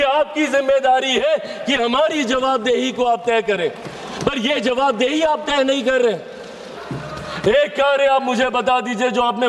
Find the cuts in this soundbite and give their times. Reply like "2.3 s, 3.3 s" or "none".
6.7 s